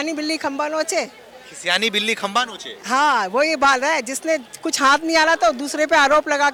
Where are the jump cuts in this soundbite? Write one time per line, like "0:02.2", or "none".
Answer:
none